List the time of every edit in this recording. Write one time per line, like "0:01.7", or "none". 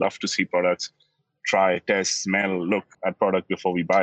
0:02.9